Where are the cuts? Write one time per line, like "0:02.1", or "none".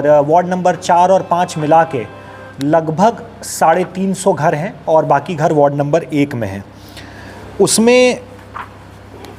none